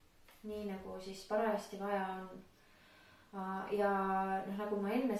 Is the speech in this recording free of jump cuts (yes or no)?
yes